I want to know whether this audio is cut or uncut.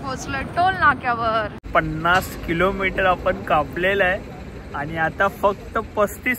cut